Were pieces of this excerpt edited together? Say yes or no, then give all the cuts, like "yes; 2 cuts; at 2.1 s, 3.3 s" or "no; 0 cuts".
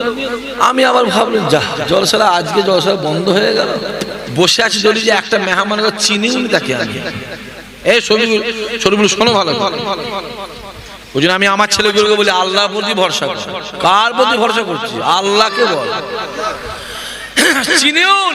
yes; 1 cut; at 4.2 s